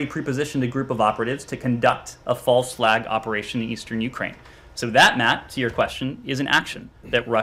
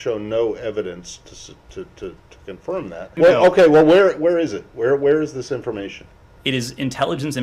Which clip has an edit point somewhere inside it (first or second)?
second